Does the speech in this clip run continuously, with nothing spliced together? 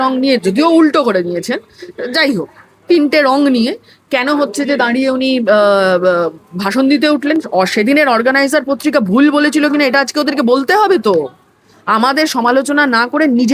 yes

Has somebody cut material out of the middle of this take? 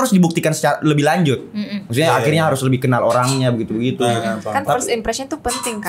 no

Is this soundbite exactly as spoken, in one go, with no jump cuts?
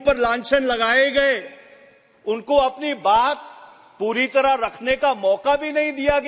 yes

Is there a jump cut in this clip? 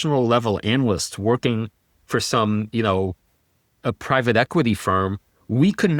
no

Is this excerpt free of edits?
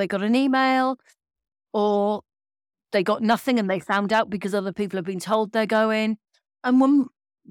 no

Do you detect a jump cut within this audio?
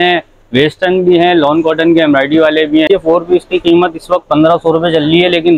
yes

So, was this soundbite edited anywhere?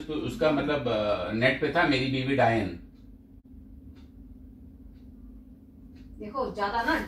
yes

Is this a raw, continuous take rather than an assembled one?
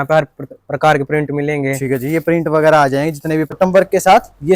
no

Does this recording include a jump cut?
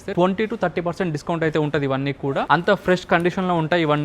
yes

